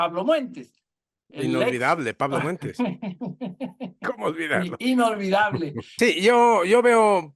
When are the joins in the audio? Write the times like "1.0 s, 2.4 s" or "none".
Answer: 5.8 s